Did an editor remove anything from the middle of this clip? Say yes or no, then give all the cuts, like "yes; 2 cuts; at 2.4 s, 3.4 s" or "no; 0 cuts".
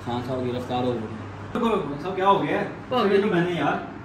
yes; 1 cut; at 1.5 s